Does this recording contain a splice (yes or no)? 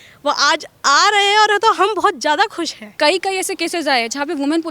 yes